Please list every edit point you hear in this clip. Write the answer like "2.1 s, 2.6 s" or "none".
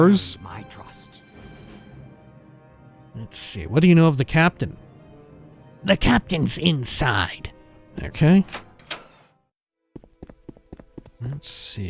none